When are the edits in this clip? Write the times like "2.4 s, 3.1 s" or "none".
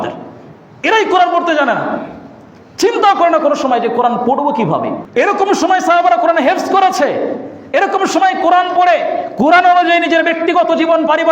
5.0 s